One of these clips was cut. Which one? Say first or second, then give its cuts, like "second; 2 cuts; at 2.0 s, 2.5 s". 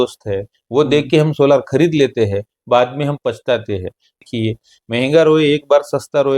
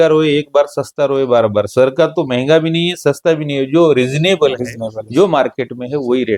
first; 1 cut; at 4.2 s